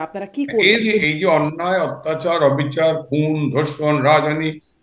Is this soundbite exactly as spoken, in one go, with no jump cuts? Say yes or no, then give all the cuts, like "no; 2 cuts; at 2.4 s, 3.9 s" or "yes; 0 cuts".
no; 1 cut; at 1.0 s